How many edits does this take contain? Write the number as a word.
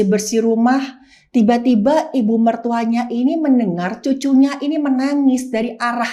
zero